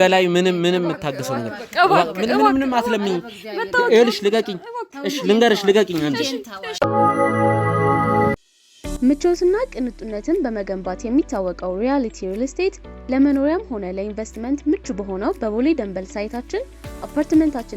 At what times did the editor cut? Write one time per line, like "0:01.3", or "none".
0:06.6
0:08.4